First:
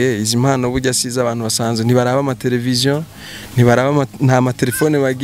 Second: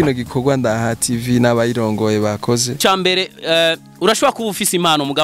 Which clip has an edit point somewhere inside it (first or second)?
second